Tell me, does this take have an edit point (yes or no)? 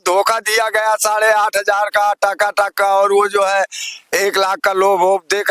no